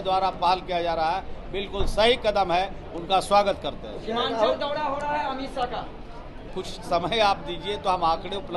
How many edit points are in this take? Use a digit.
1